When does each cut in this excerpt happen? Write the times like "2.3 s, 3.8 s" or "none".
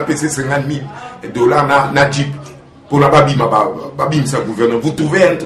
none